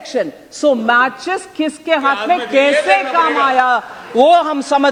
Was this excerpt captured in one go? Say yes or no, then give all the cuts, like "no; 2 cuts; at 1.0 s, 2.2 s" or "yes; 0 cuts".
yes; 0 cuts